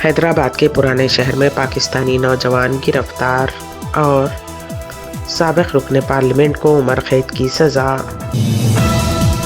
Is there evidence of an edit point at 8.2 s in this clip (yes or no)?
yes